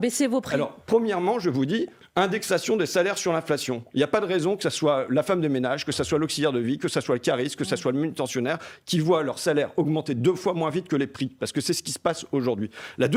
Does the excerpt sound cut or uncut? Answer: uncut